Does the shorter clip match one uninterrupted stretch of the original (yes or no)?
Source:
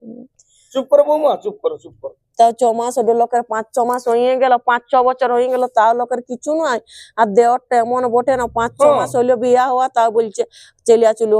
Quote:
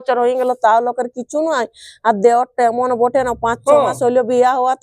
yes